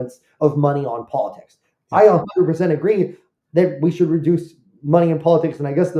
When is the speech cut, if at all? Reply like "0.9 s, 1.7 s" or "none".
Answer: none